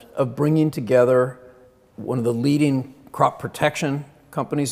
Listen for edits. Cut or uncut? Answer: uncut